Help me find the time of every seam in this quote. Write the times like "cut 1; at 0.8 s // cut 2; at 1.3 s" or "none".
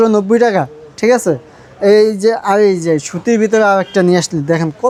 none